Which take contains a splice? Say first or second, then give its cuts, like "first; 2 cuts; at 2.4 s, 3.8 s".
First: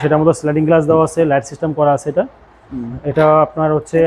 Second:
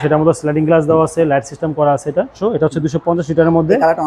second; 1 cut; at 2.4 s